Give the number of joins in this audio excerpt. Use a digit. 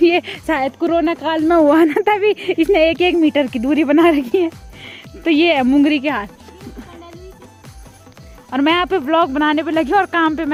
0